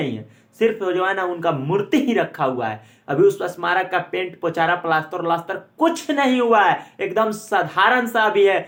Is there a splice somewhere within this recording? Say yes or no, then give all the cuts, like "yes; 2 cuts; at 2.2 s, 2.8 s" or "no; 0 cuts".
no; 0 cuts